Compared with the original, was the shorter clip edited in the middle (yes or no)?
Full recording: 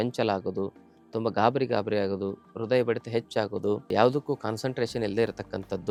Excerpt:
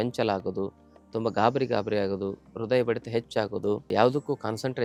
no